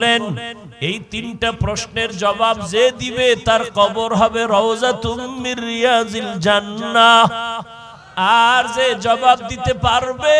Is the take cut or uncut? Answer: uncut